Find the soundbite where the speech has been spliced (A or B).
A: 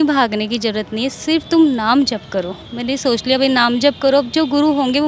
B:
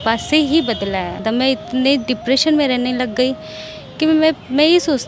B